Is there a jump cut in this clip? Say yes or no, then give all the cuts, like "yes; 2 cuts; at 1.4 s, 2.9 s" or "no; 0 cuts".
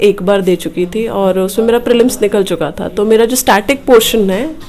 no; 0 cuts